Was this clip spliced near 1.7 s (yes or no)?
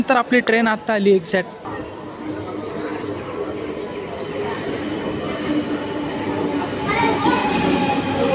yes